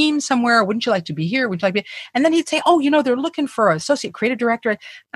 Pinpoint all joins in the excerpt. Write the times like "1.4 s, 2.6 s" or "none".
3.8 s